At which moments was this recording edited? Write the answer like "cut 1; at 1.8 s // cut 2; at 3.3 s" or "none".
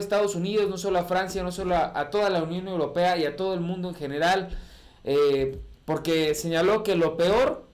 none